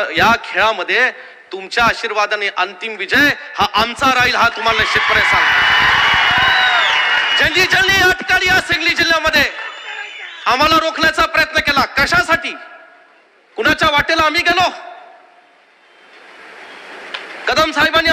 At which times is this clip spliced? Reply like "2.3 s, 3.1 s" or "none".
none